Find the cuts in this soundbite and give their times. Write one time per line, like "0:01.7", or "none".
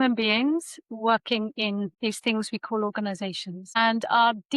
0:01.9

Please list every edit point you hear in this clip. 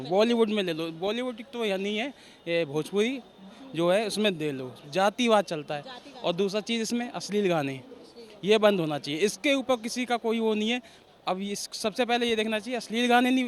none

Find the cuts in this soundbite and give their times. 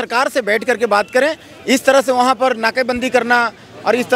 none

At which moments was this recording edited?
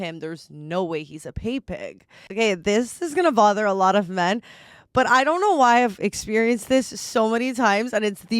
0:02.2

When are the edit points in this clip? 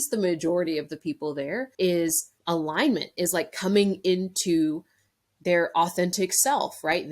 0:01.7
0:02.3

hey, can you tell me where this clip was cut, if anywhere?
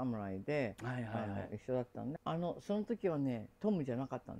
0:02.2

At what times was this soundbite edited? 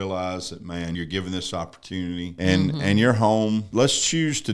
0:00.9
0:02.3
0:03.7

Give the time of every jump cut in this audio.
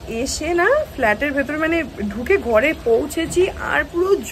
none

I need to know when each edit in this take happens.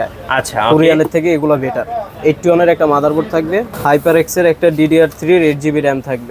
none

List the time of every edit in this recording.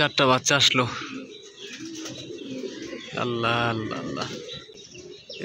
none

